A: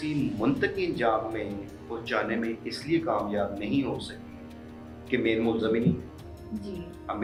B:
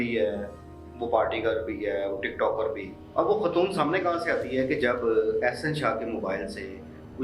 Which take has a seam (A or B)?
B